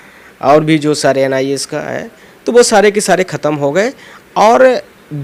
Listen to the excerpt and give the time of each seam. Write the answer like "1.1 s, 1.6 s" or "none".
none

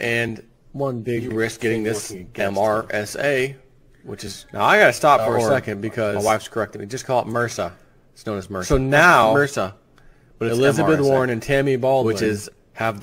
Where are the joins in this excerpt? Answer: none

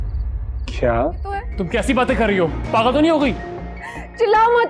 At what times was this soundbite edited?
1.5 s

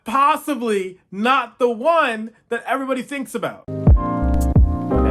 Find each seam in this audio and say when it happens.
3.6 s

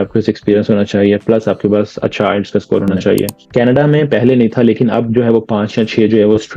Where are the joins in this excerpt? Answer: 3.4 s

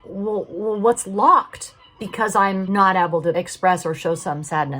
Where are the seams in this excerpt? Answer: 2.6 s, 3.3 s

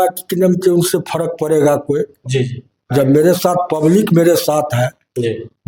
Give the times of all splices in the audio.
none

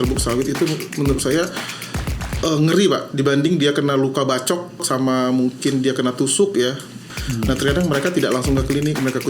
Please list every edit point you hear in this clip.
4.8 s, 7.1 s

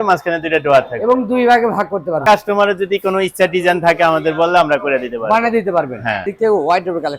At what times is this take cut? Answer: 2.2 s, 6.3 s

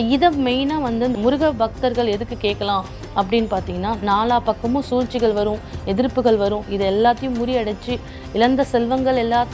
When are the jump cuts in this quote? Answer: 1.2 s

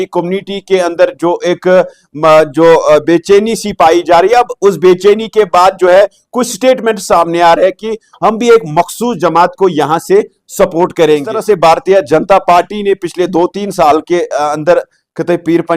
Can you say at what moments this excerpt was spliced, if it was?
11.3 s

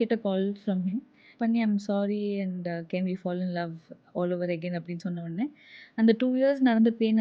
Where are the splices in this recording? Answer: 1.3 s

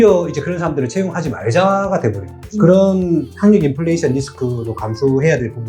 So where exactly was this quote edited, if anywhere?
none

